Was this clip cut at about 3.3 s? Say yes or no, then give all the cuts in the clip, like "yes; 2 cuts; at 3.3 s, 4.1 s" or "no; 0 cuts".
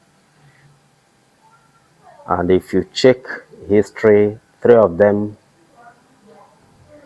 no; 0 cuts